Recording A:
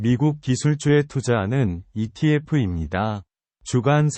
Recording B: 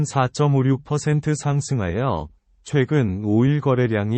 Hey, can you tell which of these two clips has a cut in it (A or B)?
A